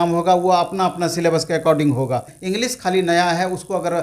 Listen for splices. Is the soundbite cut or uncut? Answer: cut